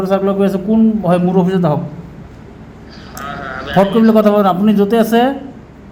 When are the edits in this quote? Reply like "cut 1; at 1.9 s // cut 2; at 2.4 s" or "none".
none